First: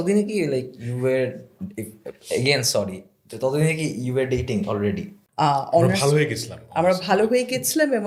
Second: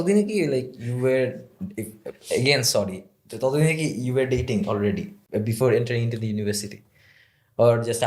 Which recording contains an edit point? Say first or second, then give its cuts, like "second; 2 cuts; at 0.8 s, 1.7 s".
first; 1 cut; at 5.1 s